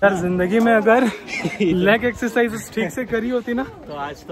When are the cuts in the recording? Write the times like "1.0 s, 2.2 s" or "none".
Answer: none